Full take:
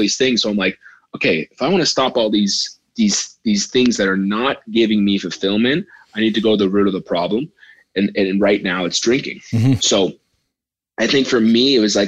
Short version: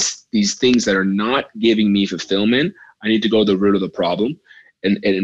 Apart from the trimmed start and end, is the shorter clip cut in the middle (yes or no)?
no